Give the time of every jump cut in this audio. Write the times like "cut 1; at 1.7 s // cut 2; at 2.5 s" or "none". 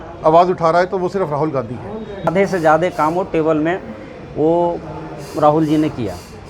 cut 1; at 2.3 s